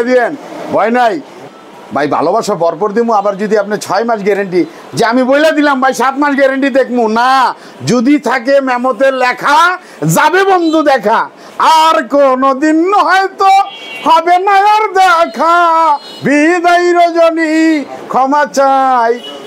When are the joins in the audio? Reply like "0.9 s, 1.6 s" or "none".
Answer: 1.4 s